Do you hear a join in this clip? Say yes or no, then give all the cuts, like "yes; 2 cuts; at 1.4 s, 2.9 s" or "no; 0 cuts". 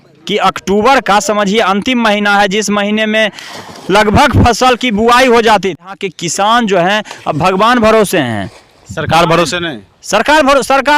yes; 1 cut; at 5.9 s